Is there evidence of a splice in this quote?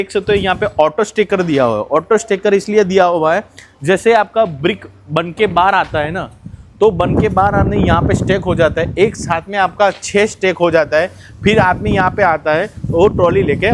no; 0 cuts

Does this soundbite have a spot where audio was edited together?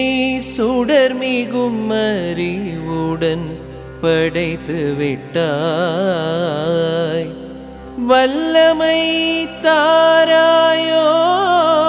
no; 0 cuts

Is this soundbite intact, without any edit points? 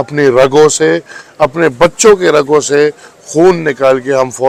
yes; 0 cuts

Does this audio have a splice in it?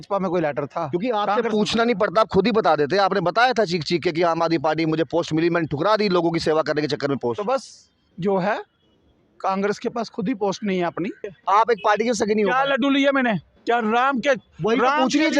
yes; 1 cut; at 11.3 s

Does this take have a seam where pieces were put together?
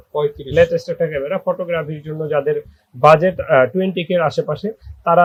no; 0 cuts

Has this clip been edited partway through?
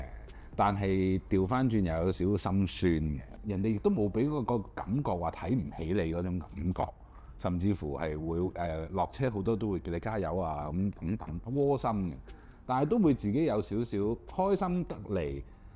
no; 0 cuts

